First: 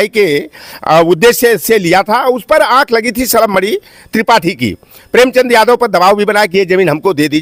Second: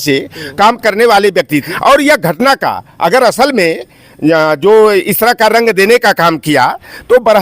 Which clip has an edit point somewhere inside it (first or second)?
second